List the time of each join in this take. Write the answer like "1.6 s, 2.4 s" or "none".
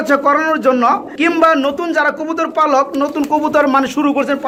none